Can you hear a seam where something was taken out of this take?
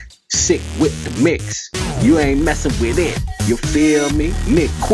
no; 0 cuts

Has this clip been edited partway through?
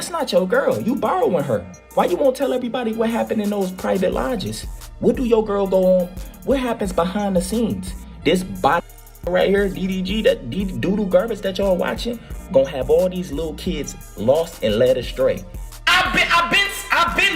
yes; 1 cut; at 15.6 s

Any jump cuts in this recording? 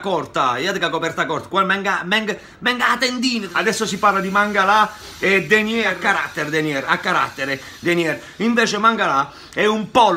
yes; 2 cuts; at 3.5 s, 5.9 s

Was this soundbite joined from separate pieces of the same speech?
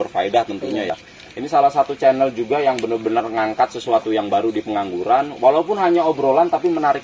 no; 0 cuts

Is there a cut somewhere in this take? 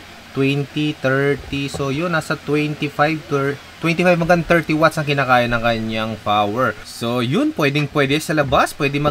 no; 0 cuts

